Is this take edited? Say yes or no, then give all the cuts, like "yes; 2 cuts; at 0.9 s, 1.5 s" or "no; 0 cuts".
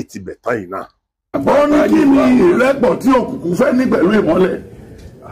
yes; 1 cut; at 1.4 s